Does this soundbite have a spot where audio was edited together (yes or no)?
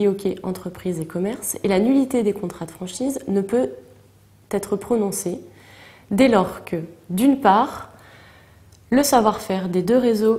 no